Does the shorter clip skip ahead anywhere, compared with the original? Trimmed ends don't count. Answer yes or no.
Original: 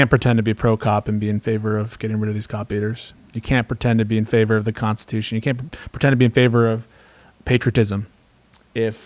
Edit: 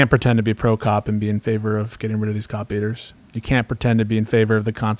no